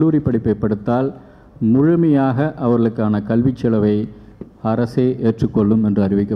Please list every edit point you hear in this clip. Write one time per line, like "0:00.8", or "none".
none

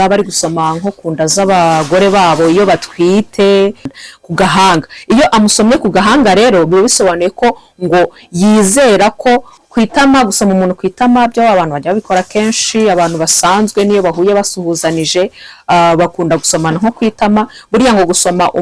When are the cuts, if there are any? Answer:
0:04.0
0:09.5

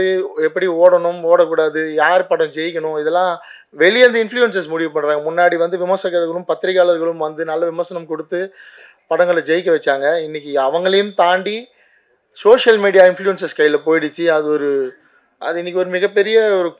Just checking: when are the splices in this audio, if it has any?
none

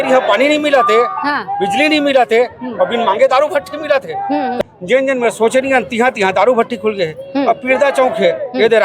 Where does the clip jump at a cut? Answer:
0:04.6

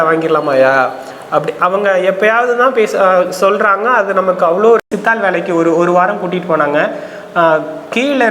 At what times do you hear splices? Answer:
0:04.8

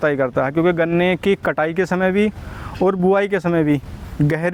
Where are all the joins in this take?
none

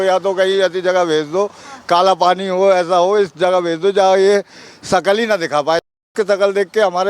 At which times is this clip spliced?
none

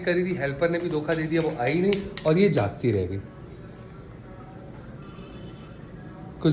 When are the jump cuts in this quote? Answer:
none

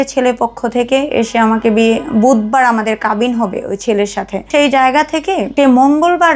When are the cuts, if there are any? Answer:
0:04.5
0:05.5

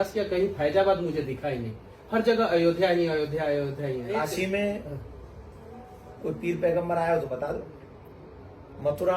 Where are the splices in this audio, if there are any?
0:04.3

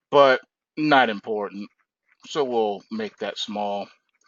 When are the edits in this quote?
none

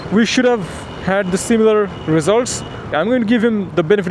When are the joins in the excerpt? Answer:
0:02.9

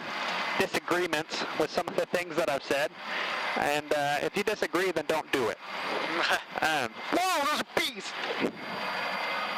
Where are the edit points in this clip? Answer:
none

